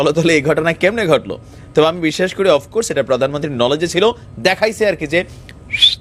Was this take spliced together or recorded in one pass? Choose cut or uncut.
uncut